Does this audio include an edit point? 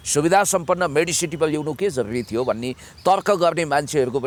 no; 0 cuts

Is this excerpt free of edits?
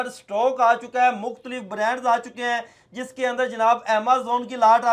yes; 0 cuts

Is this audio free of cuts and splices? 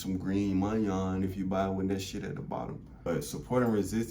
no; 1 cut; at 3.1 s

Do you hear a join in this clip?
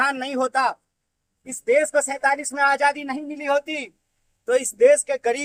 no; 0 cuts

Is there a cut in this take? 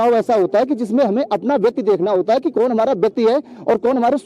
no; 0 cuts

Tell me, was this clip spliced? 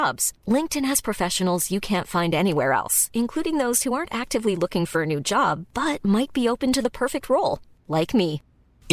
no; 0 cuts

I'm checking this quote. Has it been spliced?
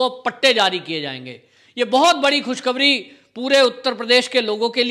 no; 0 cuts

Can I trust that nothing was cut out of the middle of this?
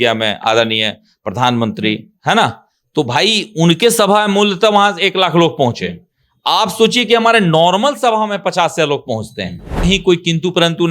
no; 1 cut; at 9.8 s

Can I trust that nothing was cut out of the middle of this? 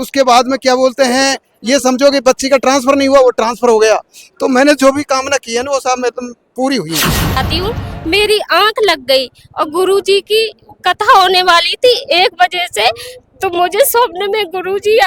no; 1 cut; at 7.4 s

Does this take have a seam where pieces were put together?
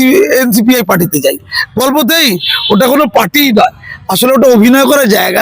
yes; 1 cut; at 2.5 s

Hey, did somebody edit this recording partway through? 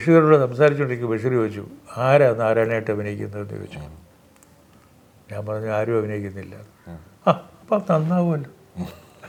no; 0 cuts

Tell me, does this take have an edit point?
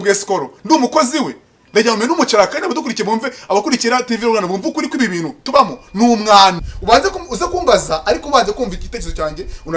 yes; 1 cut; at 6.6 s

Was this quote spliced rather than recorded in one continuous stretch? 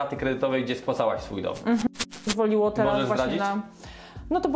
yes; 1 cut; at 2.0 s

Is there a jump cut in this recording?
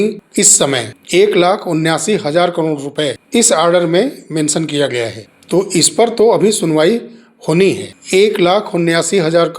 yes; 1 cut; at 8.0 s

